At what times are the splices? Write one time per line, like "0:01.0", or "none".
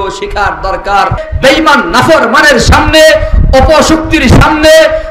0:01.3